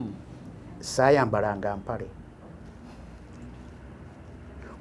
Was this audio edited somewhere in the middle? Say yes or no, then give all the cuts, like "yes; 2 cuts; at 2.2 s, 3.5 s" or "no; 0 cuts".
no; 0 cuts